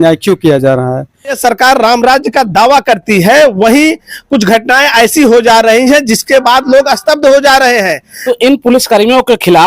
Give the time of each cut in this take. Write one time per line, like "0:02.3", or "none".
0:01.4
0:08.1